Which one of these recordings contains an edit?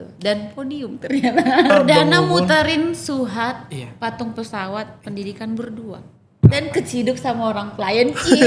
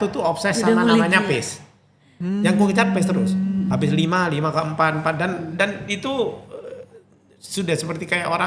first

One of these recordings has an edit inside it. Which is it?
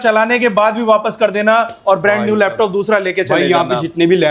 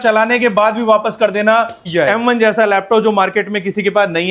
second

